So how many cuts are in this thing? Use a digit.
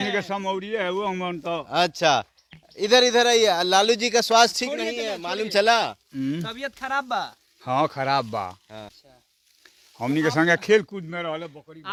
0